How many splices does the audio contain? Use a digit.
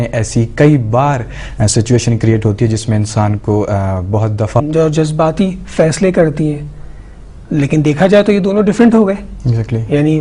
0